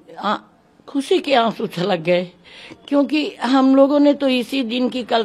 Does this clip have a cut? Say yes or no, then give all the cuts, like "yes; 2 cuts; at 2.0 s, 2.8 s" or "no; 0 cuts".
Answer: no; 0 cuts